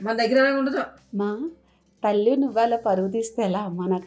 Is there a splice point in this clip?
yes; 1 cut; at 1.0 s

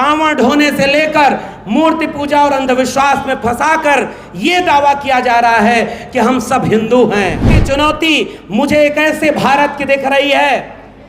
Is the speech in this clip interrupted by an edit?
yes; 1 cut; at 7.6 s

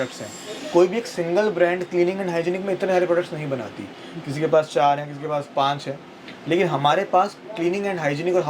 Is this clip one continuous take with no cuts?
yes; 0 cuts

